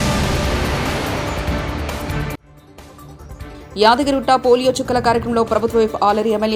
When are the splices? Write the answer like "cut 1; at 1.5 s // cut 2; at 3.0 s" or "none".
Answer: none